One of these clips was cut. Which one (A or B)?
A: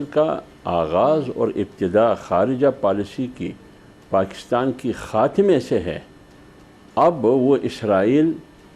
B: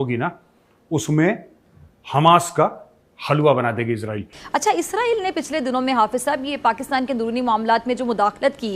B